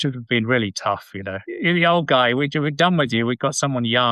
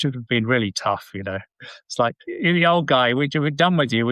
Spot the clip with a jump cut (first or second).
first